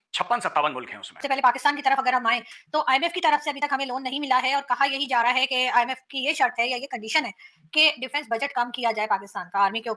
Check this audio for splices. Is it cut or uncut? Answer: cut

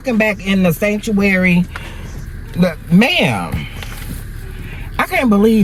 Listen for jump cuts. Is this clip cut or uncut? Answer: uncut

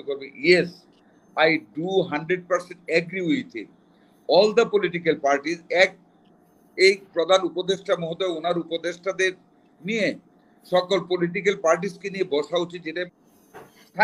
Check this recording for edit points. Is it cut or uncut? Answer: cut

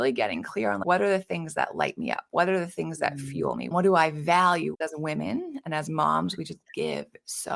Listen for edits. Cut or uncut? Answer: cut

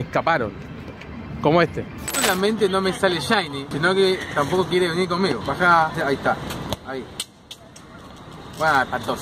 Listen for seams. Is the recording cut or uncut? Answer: cut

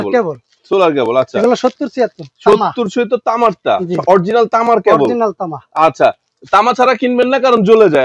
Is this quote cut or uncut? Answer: uncut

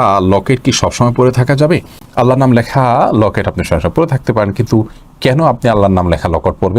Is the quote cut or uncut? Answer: uncut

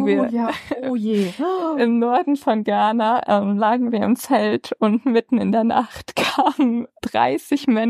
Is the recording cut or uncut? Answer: uncut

